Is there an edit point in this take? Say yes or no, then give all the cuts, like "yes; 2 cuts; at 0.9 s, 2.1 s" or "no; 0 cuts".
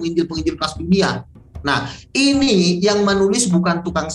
no; 0 cuts